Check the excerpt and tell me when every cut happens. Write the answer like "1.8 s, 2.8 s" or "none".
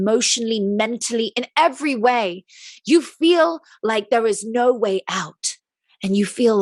none